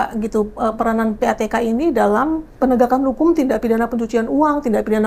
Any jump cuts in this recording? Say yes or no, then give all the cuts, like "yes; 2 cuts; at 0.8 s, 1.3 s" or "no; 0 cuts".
yes; 1 cut; at 2.5 s